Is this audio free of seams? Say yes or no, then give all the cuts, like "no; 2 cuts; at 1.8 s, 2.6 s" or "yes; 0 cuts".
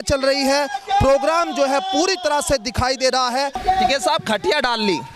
no; 1 cut; at 3.6 s